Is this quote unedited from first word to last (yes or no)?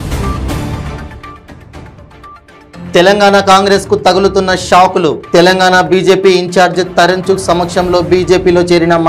no